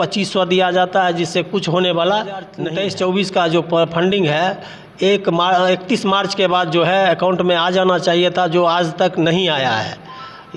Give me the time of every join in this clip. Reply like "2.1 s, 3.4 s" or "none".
2.6 s